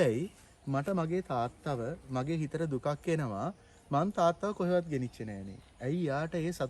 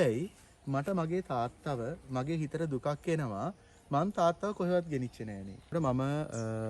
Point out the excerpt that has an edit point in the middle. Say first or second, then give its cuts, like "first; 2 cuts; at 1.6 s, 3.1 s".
second; 1 cut; at 5.7 s